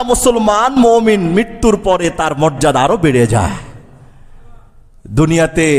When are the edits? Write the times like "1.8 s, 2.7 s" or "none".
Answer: none